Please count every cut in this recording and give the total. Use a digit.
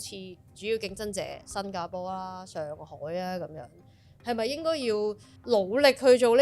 1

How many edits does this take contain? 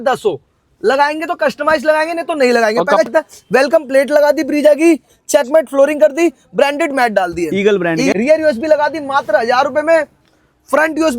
2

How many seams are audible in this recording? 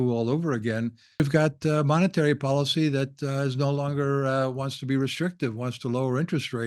1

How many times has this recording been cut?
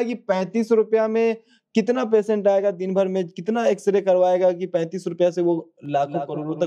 0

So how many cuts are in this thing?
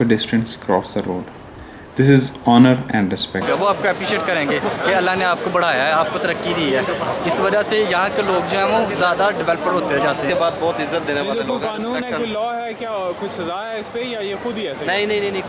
2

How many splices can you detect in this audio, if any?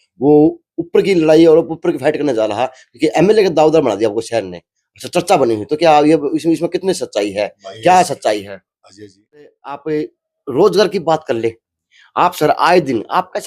1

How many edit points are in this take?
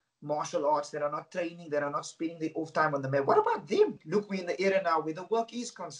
1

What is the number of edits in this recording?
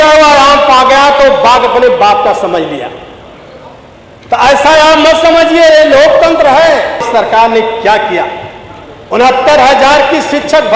1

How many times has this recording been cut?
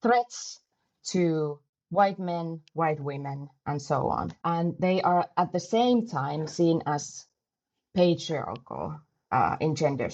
1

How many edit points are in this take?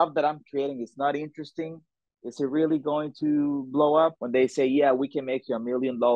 1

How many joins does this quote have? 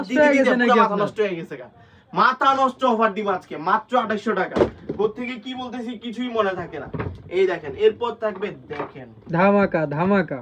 0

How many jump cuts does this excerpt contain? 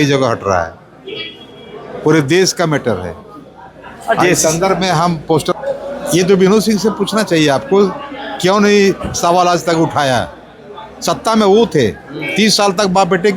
1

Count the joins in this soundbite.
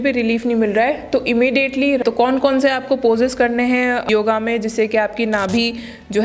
2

